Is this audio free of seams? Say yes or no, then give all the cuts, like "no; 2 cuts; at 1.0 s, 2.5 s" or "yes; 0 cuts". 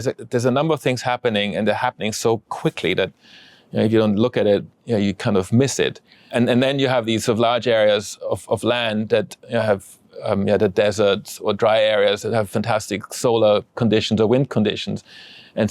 no; 1 cut; at 6.3 s